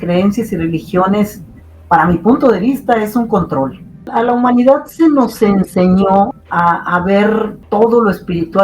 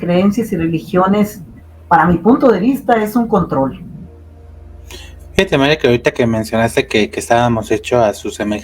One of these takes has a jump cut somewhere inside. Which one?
first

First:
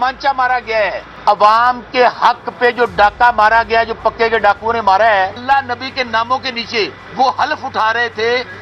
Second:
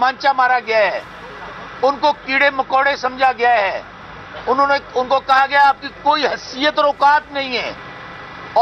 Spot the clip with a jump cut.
first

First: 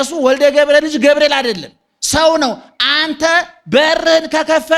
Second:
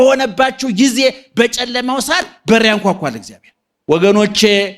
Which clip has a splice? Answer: second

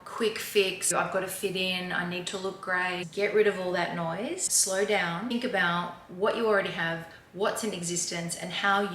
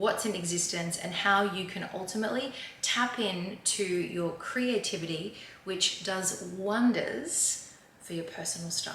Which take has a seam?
first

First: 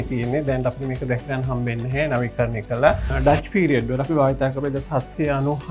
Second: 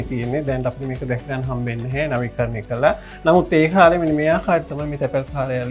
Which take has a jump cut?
first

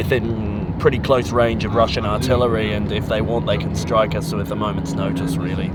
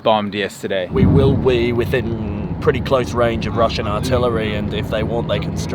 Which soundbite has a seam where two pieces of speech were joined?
second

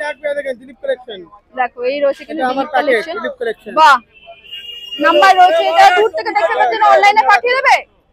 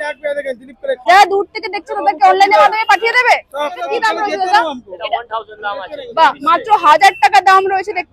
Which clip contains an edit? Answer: second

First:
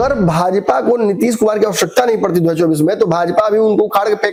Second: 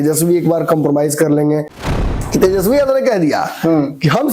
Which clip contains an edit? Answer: second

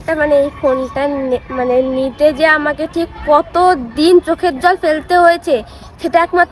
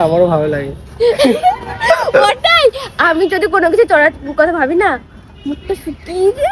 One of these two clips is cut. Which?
second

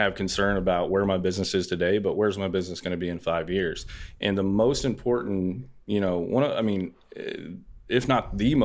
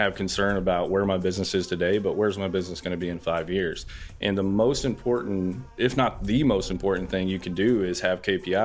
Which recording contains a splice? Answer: second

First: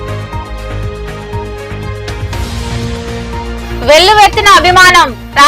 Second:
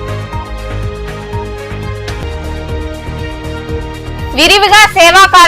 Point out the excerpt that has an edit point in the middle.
first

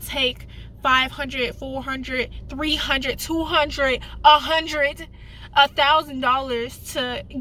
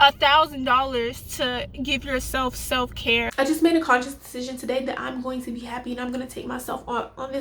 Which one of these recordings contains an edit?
second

